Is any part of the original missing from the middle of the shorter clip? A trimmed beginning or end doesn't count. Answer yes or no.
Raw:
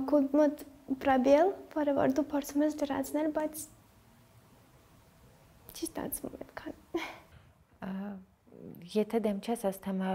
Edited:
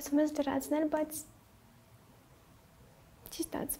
no